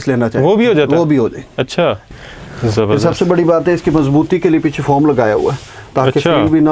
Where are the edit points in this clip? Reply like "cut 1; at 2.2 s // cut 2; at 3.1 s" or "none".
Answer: cut 1; at 2.0 s